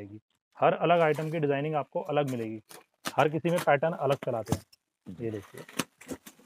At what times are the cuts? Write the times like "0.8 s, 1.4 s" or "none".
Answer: none